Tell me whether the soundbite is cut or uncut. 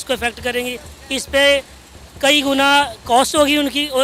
uncut